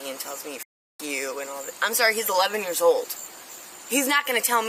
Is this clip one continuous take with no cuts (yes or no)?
yes